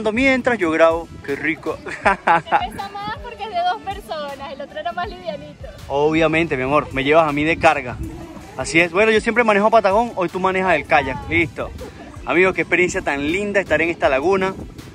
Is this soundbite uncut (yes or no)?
yes